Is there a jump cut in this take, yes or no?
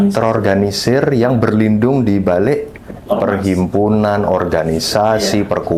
no